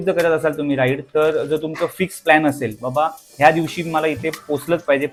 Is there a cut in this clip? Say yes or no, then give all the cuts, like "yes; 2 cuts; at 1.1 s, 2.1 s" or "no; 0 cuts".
no; 0 cuts